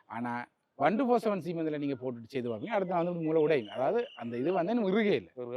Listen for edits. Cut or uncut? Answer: uncut